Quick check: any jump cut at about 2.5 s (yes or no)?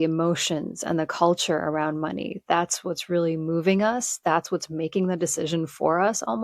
no